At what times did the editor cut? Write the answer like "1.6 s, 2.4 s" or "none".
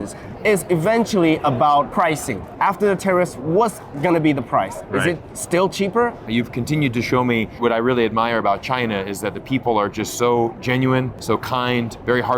2.5 s, 6.2 s